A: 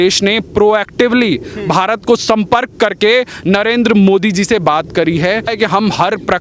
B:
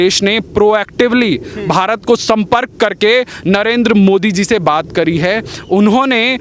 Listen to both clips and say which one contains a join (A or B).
A